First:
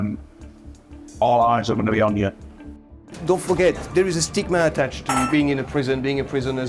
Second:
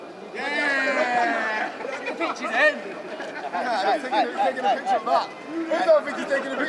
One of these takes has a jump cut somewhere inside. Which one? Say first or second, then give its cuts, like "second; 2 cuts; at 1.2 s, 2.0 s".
first; 2 cuts; at 2.9 s, 3.9 s